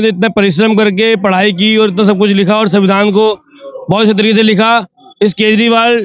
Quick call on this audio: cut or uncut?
uncut